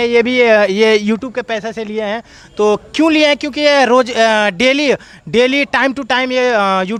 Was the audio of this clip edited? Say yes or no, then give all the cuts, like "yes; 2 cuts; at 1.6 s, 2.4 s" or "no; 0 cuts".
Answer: no; 0 cuts